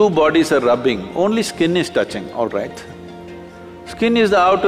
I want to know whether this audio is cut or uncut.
uncut